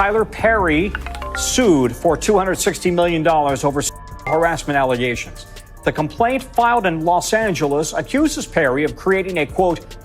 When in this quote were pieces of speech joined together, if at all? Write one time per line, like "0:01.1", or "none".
none